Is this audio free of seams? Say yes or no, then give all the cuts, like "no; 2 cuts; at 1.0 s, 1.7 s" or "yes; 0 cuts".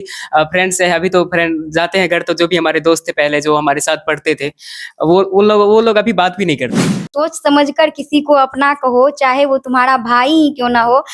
no; 1 cut; at 7.1 s